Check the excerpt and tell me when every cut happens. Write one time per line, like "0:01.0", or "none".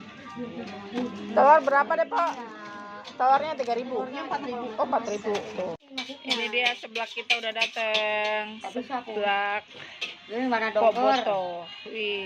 0:05.9